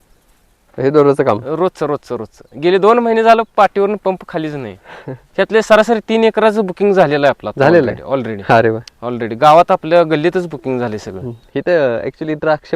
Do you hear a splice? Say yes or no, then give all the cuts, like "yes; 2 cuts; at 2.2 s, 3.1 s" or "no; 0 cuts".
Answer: yes; 1 cut; at 5.2 s